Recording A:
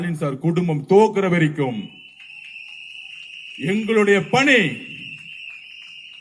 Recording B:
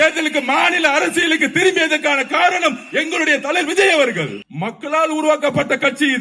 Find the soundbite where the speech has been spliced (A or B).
B